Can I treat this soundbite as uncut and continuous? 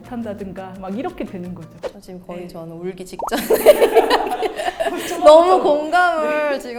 yes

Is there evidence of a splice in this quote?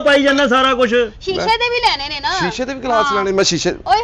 no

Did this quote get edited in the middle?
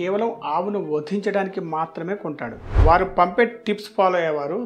yes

